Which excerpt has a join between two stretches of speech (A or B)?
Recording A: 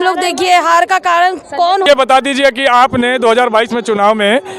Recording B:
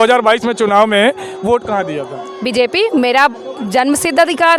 A